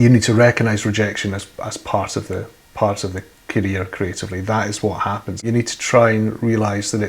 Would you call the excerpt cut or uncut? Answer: cut